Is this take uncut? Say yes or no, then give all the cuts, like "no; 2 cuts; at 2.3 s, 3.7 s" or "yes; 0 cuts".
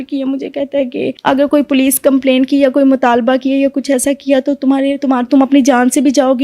no; 1 cut; at 1.1 s